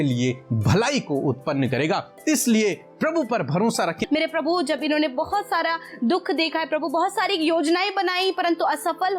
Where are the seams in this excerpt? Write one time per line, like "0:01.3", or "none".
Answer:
0:04.0